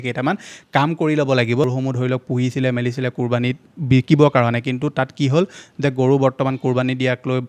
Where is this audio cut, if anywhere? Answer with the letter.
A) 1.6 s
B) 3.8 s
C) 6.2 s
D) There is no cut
A